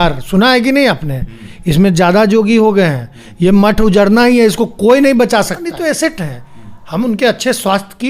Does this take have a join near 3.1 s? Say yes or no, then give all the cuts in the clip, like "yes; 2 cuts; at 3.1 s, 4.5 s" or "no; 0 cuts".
no; 1 cut; at 5.7 s